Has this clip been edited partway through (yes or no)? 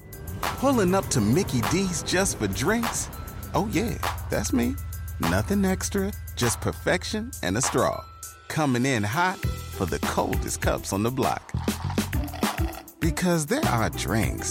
no